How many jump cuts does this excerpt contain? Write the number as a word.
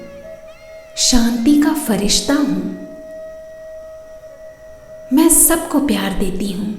two